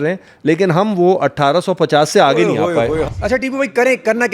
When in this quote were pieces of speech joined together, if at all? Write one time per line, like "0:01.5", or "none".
0:03.2